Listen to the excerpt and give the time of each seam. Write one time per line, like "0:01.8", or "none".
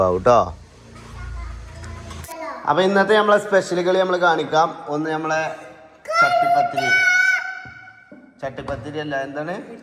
0:02.3